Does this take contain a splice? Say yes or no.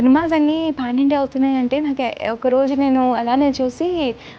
no